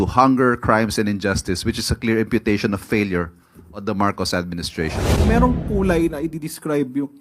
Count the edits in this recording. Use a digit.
1